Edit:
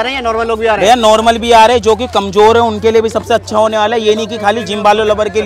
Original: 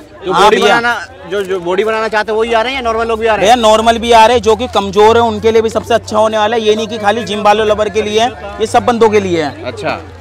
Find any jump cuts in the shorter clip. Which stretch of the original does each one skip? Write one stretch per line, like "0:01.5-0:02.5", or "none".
none

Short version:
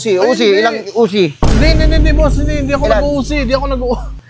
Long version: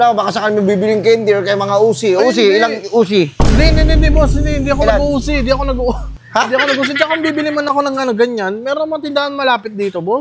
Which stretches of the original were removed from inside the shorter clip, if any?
none

